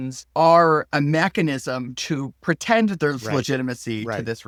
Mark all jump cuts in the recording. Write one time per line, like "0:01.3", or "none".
none

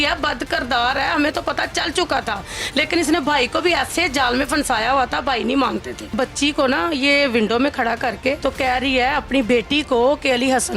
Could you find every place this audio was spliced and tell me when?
0:06.1
0:08.4

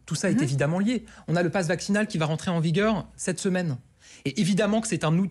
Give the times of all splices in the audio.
none

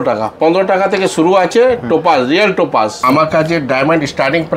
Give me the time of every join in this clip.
0:03.0

